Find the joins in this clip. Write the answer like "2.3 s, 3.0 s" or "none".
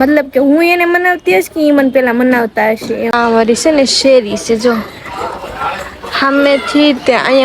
3.1 s